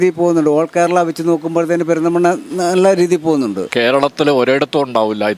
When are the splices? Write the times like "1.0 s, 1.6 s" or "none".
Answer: 3.6 s